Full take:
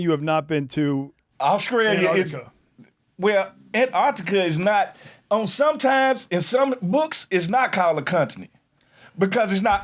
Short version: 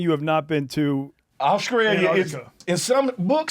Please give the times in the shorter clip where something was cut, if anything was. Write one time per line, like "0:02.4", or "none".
0:02.6